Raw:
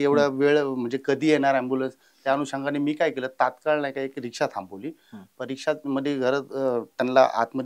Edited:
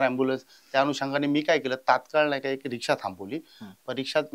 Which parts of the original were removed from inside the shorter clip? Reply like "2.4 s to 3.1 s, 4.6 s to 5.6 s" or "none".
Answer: none